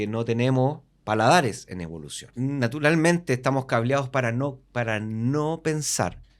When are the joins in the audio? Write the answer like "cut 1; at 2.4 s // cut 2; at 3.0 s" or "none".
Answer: cut 1; at 2.2 s